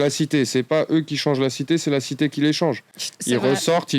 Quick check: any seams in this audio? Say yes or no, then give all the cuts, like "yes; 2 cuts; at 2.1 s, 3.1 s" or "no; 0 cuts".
no; 0 cuts